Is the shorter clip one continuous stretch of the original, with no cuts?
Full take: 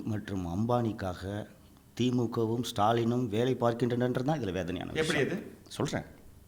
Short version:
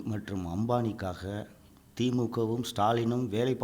yes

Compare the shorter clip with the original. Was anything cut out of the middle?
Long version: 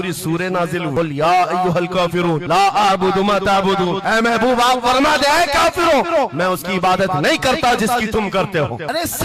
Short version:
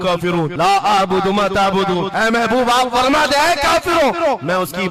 no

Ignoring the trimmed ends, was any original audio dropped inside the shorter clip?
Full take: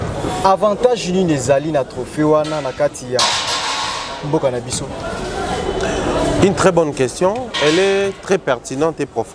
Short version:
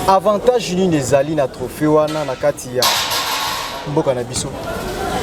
no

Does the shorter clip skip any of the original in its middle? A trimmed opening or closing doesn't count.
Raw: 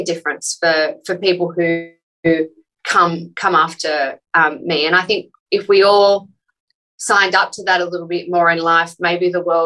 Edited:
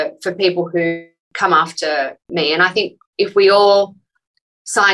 yes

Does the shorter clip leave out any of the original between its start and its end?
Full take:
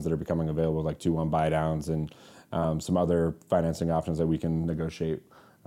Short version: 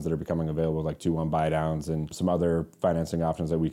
yes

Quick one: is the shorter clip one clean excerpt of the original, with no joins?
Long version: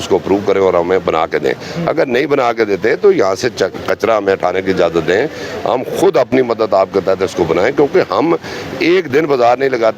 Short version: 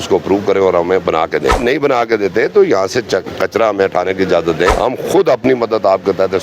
no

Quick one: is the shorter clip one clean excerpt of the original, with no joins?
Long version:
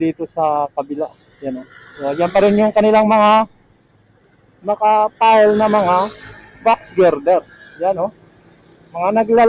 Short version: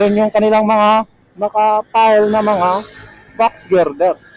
no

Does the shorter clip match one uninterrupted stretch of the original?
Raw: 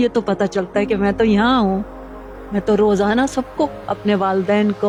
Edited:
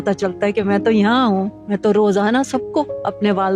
no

